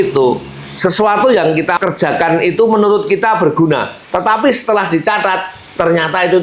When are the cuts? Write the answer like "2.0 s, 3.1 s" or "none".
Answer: 1.8 s